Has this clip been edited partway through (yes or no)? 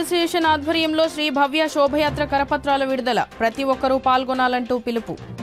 no